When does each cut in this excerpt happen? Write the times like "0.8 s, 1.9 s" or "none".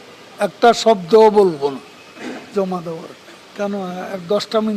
3.4 s